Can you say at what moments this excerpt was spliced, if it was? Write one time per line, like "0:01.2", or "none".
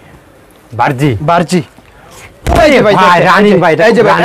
none